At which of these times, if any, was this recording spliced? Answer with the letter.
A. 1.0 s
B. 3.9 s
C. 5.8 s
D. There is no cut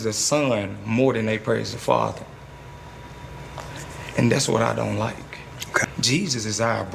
C